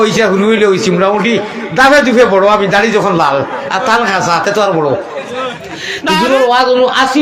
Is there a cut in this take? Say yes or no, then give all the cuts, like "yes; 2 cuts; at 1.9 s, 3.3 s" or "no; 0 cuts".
yes; 1 cut; at 6.2 s